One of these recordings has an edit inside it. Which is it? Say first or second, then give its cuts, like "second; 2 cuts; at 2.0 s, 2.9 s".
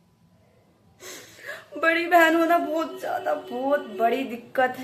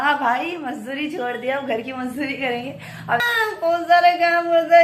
second; 1 cut; at 3.2 s